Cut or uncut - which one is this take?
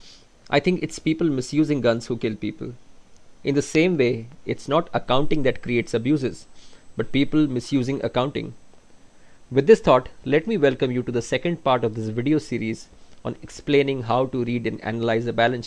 uncut